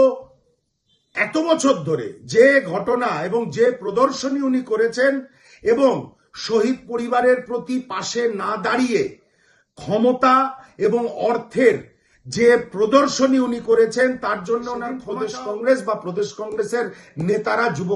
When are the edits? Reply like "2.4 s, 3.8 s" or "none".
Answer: 15.0 s